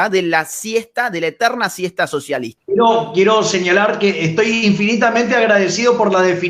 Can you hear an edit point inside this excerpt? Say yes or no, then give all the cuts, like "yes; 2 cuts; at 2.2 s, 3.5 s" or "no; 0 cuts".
yes; 1 cut; at 2.5 s